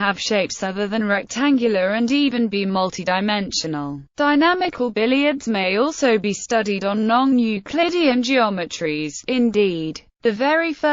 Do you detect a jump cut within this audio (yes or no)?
yes